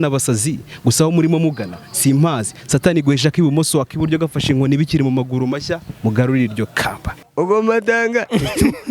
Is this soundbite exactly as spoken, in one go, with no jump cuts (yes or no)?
no